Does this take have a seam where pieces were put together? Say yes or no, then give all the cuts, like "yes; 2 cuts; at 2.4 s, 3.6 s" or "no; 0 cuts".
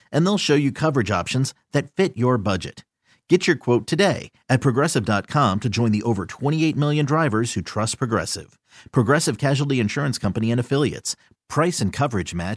no; 0 cuts